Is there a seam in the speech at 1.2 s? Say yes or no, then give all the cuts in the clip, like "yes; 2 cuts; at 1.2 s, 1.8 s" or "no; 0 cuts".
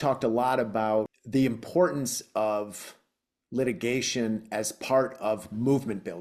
yes; 1 cut; at 1.2 s